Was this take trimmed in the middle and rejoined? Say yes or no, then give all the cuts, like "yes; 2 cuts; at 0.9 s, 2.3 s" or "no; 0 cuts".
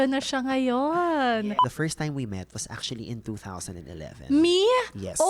yes; 1 cut; at 1.4 s